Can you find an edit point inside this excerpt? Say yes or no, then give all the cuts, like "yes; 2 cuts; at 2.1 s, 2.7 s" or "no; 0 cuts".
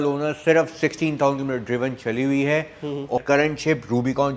yes; 1 cut; at 3.2 s